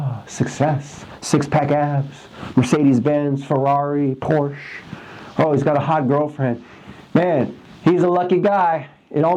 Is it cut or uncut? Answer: uncut